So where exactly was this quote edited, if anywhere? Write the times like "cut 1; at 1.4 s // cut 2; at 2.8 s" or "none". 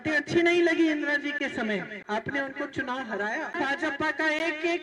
cut 1; at 2.0 s // cut 2; at 3.5 s